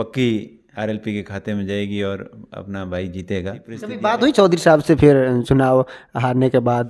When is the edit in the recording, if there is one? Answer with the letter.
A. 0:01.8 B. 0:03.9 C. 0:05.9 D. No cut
B